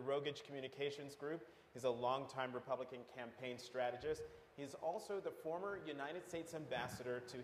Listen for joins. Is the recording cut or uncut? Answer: cut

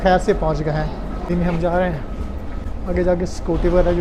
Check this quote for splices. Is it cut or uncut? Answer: uncut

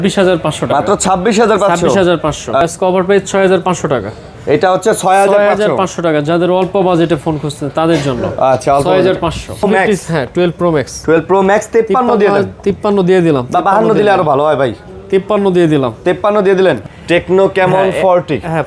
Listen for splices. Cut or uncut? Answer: cut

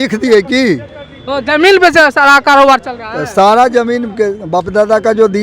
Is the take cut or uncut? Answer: uncut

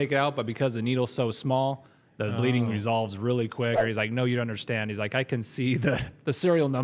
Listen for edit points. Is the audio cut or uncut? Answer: cut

